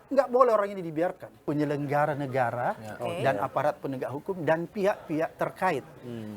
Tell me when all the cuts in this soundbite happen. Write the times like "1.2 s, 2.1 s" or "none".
1.4 s